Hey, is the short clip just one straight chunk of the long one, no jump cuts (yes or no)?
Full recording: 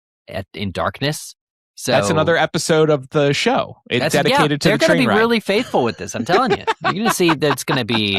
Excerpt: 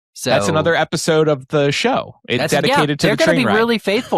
yes